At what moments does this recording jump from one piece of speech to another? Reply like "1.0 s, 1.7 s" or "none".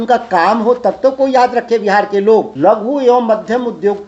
2.5 s